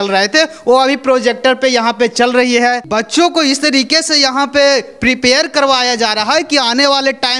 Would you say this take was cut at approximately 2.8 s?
yes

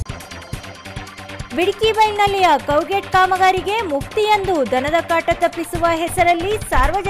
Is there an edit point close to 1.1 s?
yes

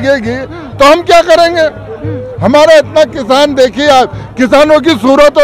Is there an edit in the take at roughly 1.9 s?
no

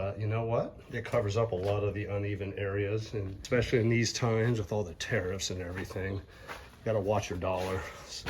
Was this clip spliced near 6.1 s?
no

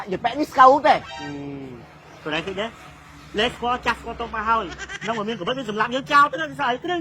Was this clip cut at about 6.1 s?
no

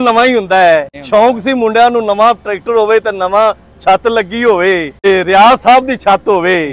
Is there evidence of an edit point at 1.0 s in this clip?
yes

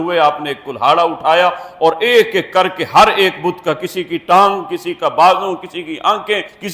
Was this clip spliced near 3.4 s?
no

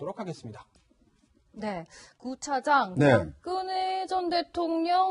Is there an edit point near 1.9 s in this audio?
no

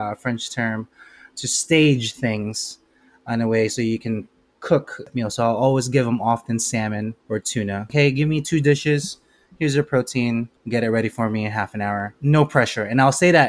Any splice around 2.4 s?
no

